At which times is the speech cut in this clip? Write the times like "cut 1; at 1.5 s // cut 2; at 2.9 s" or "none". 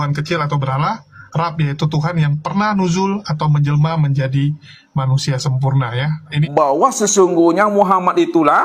cut 1; at 6.3 s